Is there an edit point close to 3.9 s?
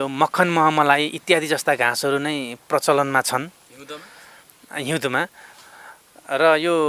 no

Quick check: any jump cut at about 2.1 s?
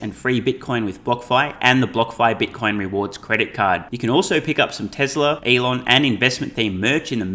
no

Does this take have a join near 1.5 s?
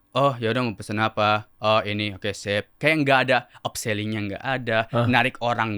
yes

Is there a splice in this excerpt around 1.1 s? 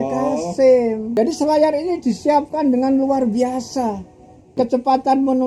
yes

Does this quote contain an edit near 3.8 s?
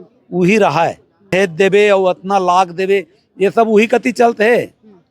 no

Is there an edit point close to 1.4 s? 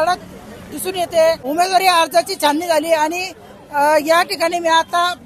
yes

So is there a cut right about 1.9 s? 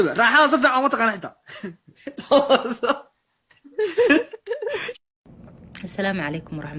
no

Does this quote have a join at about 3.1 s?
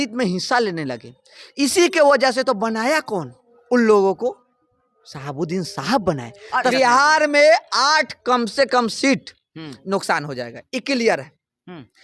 no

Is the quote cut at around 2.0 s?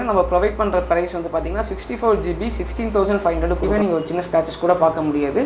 no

